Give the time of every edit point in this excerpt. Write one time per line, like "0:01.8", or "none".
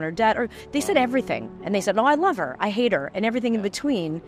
none